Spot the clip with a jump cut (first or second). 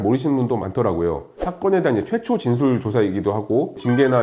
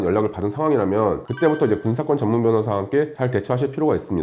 first